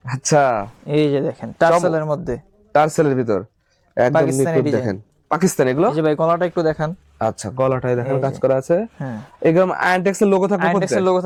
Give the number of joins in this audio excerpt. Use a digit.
0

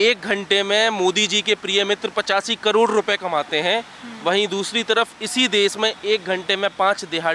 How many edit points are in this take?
0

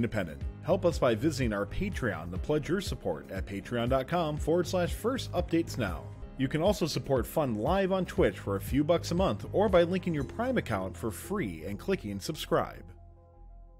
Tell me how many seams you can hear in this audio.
1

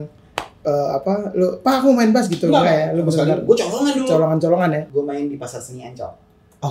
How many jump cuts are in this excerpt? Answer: 1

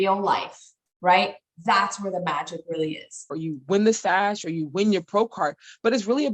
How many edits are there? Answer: 1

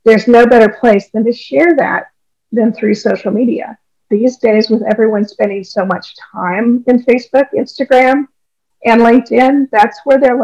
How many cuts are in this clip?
1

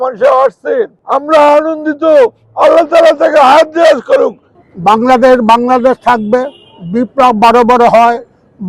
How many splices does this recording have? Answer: 2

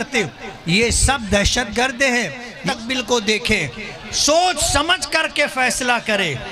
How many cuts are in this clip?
1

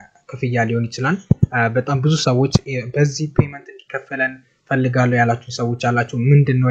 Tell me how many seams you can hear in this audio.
0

